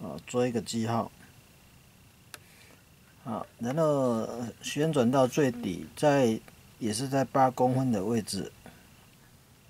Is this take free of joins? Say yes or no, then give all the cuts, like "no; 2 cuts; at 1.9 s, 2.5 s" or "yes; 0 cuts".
yes; 0 cuts